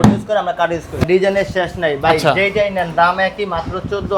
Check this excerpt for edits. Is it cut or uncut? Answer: cut